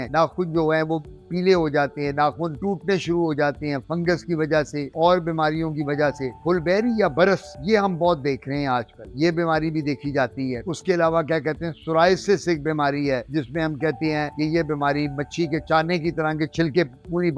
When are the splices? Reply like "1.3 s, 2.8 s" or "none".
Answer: none